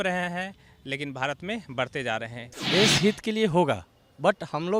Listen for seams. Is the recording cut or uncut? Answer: cut